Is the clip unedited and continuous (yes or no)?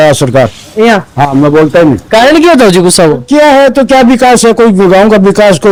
yes